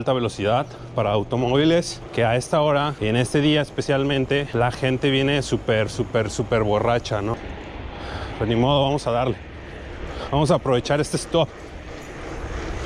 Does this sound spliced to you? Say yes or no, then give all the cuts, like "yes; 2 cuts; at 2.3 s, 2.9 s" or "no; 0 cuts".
yes; 4 cuts; at 2.0 s, 3.0 s, 4.5 s, 7.5 s